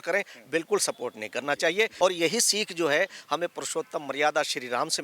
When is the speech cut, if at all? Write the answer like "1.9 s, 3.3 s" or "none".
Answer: 1.9 s